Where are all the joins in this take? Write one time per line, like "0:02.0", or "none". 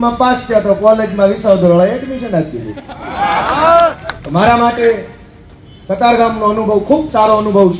none